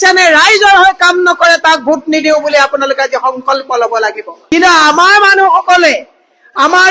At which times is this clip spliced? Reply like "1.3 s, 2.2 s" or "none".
4.3 s